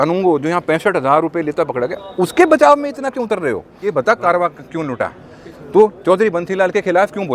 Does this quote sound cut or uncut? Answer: cut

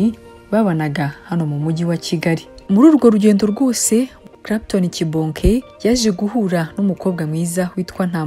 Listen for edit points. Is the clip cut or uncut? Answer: cut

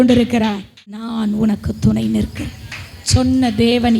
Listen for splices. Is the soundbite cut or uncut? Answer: cut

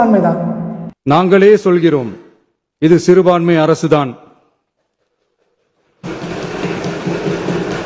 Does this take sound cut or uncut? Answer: uncut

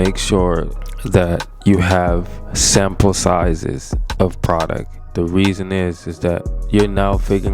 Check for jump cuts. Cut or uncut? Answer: cut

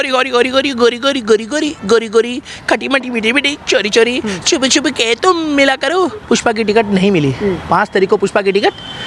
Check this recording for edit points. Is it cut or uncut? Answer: uncut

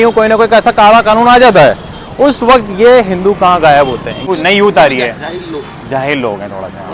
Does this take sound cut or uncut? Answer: cut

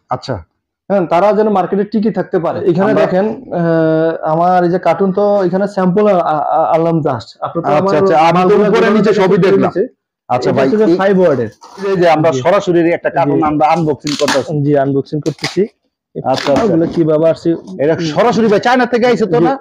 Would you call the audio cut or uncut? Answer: cut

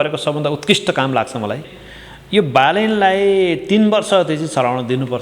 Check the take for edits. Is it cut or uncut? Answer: cut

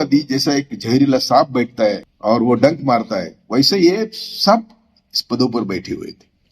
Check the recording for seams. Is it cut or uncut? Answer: uncut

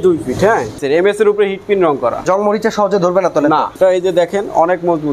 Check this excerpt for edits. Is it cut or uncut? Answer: cut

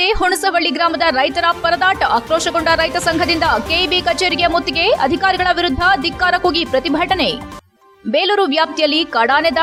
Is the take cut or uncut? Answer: uncut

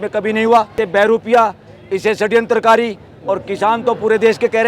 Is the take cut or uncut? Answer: cut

